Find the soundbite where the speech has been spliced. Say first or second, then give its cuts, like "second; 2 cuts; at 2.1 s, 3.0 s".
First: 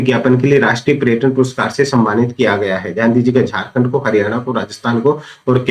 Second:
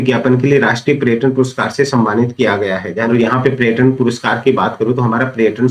second; 1 cut; at 3.1 s